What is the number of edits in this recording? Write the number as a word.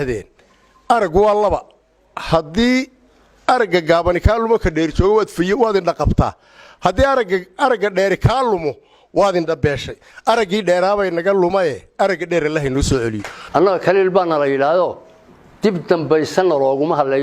one